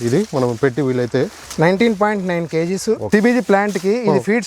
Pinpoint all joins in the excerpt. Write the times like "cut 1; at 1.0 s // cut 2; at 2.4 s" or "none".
cut 1; at 1.4 s // cut 2; at 3.0 s